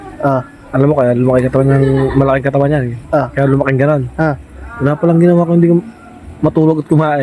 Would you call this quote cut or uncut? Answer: uncut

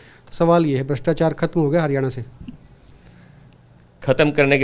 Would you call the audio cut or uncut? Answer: uncut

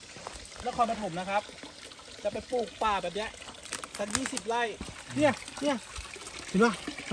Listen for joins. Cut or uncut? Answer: cut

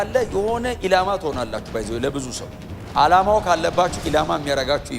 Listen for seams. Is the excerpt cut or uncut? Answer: uncut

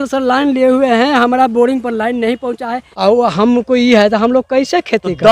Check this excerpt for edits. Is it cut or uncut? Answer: cut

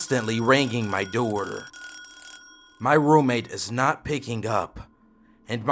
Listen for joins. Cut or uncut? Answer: uncut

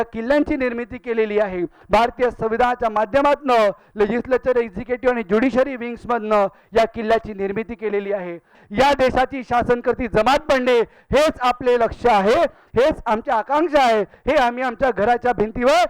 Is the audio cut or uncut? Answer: cut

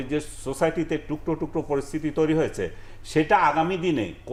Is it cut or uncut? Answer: uncut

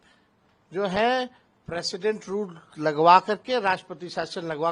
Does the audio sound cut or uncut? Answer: uncut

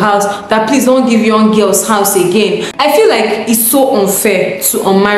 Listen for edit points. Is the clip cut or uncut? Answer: cut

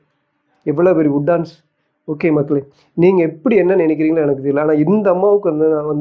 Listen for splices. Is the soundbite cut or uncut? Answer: uncut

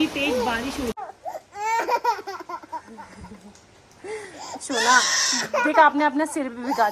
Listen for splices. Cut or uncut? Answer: cut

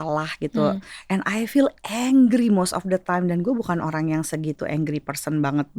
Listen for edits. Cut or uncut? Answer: uncut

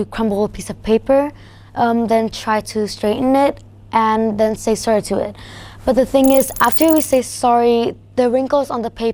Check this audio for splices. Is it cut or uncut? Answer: uncut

